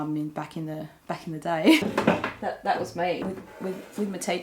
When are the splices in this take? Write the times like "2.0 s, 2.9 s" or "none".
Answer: 1.8 s, 3.2 s